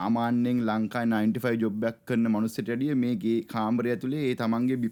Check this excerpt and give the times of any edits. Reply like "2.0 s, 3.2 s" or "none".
none

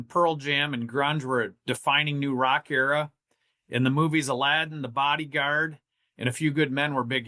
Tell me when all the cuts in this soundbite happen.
none

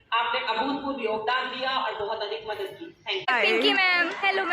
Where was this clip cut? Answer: 3.3 s

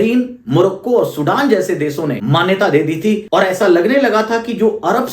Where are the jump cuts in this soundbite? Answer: 2.2 s, 3.2 s

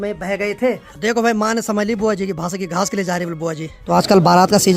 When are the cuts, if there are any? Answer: 0.9 s, 3.8 s

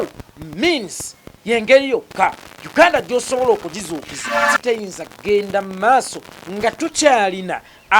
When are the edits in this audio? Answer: 4.5 s

